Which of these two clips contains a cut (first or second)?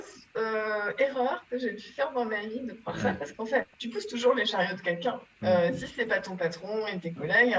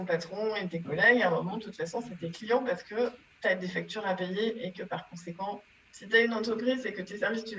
first